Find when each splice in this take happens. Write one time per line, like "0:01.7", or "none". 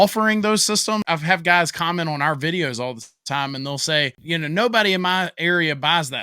0:01.0
0:04.2